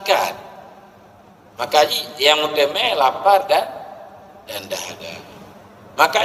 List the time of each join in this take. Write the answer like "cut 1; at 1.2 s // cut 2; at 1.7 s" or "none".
none